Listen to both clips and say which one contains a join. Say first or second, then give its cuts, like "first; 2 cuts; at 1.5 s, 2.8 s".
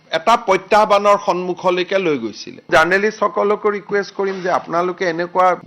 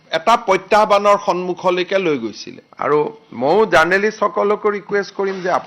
first; 1 cut; at 2.7 s